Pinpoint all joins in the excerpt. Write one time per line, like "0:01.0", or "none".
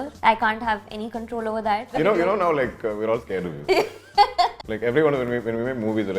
0:01.9
0:04.7